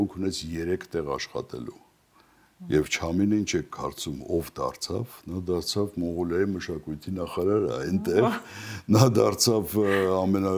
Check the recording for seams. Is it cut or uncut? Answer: uncut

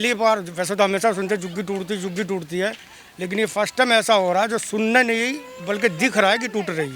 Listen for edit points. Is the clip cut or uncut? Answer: uncut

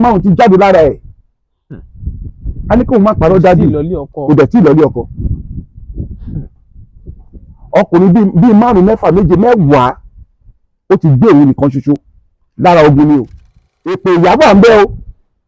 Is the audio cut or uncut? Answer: cut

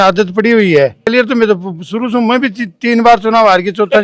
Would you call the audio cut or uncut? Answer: cut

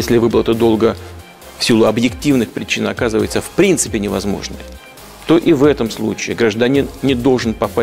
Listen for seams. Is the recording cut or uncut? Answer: uncut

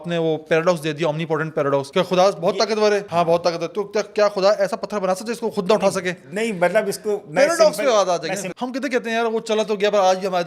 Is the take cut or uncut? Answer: cut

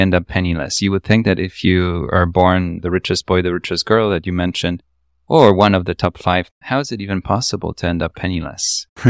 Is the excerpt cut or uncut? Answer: cut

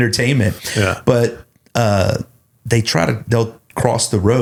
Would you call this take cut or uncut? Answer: uncut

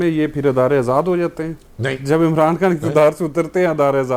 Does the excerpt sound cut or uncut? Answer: uncut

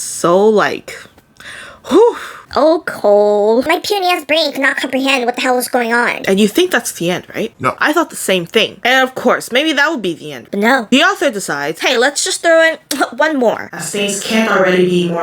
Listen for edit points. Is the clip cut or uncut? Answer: cut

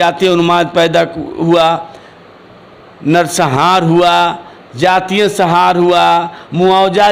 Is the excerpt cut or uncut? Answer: uncut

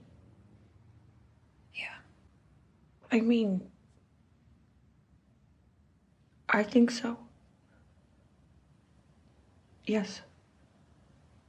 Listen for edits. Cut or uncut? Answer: cut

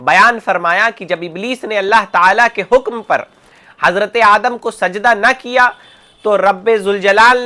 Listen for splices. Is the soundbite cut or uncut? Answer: uncut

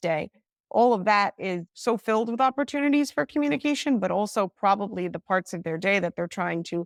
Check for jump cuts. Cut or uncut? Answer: uncut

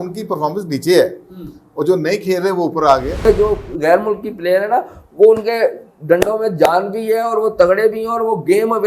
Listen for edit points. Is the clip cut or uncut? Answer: cut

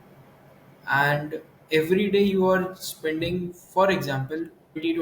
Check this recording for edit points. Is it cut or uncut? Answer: uncut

